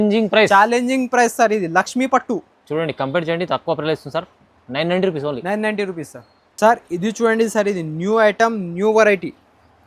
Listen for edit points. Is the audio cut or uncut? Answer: uncut